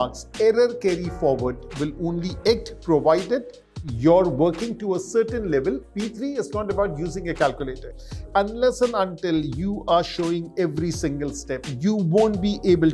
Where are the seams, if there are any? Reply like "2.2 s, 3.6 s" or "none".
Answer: 5.9 s, 8.1 s, 11.7 s